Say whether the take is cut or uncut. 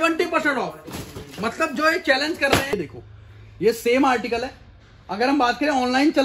cut